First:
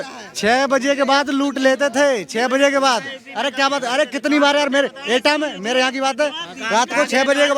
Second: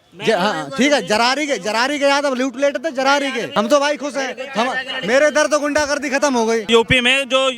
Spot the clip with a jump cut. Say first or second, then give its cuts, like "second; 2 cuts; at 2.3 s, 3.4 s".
second; 2 cuts; at 3.6 s, 6.7 s